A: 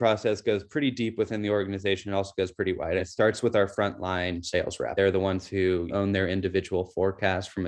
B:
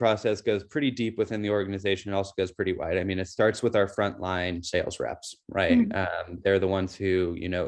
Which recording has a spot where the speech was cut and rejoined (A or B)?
A